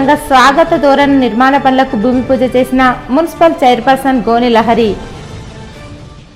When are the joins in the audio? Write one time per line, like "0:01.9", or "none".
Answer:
none

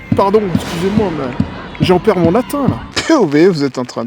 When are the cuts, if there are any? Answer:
0:02.9

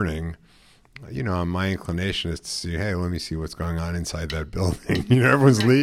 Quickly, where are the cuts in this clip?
none

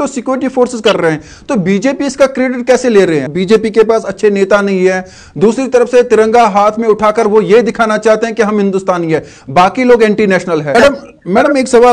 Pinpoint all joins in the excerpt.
0:03.3
0:10.7

